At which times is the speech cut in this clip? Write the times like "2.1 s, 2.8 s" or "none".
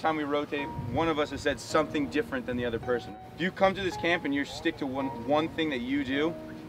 3.1 s